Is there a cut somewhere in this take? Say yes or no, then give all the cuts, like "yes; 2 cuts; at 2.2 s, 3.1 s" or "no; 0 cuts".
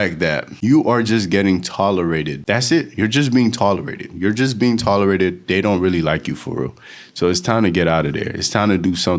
no; 0 cuts